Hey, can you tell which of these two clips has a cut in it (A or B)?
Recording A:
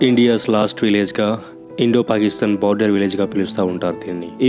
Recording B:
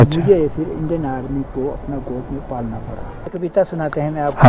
B